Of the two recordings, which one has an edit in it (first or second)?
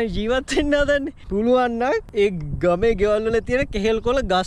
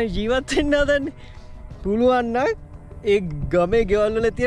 first